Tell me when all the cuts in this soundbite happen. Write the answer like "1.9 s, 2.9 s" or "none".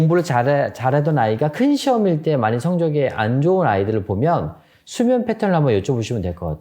none

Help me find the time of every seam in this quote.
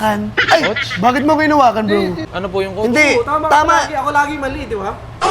2.3 s

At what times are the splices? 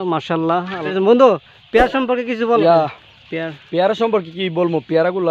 0.9 s, 2.6 s

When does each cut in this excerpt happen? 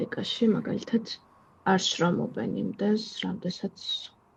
none

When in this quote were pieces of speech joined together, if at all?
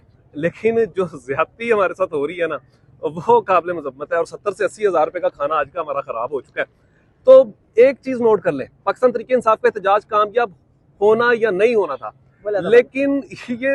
none

